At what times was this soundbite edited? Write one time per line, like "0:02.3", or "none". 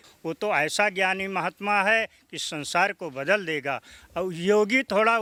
none